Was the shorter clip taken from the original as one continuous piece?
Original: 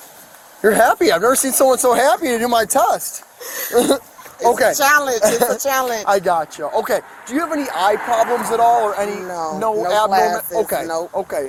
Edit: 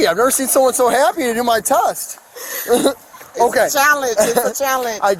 yes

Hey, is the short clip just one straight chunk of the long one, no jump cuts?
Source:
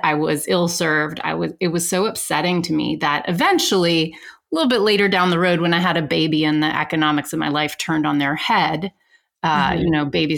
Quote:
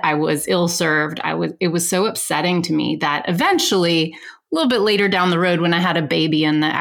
yes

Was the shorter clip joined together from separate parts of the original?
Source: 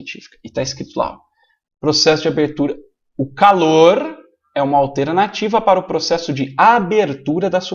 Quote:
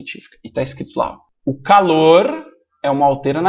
yes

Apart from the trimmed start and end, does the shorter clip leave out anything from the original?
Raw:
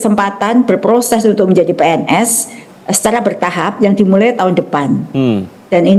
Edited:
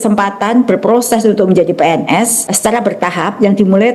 yes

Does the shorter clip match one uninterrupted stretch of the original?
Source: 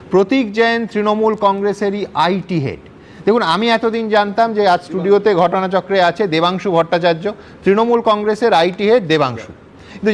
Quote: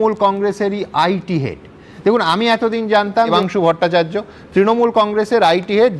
no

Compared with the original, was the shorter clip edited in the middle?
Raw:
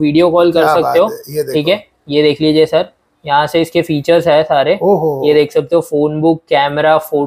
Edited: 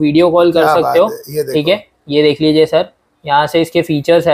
no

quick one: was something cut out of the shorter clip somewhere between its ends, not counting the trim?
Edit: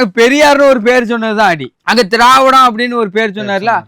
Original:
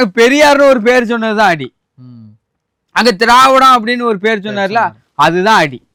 yes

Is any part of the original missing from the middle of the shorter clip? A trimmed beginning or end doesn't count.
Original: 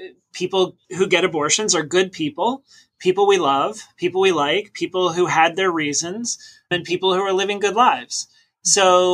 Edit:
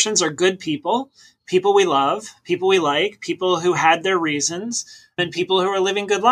no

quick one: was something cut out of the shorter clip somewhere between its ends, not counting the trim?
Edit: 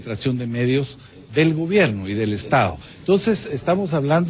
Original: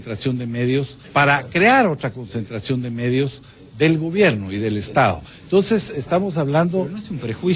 yes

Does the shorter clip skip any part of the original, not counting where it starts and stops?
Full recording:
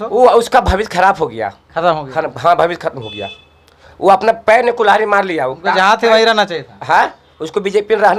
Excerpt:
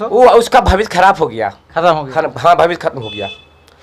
no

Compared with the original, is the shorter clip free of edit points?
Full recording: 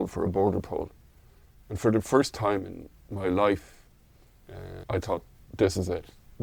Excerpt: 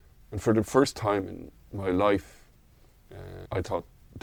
yes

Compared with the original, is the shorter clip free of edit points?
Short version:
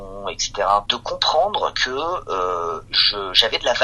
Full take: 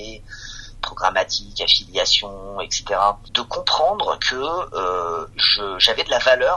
no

